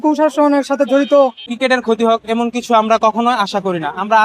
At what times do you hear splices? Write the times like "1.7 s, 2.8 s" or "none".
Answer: 1.4 s

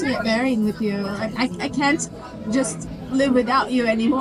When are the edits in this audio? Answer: none

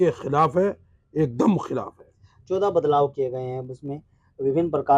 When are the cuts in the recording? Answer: none

